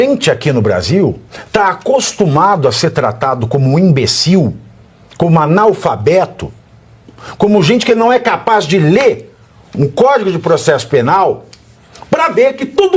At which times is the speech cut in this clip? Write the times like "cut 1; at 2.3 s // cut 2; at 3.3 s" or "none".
cut 1; at 1.3 s